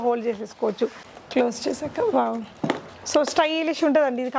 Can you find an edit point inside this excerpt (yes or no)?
yes